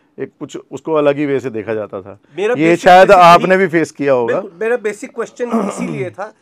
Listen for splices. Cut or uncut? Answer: uncut